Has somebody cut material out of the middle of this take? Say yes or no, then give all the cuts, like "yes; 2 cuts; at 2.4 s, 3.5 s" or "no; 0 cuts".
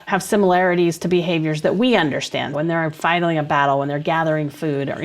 yes; 1 cut; at 2.5 s